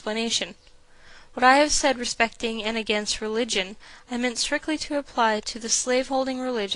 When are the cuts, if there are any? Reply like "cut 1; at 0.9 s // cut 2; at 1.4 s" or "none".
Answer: cut 1; at 1.9 s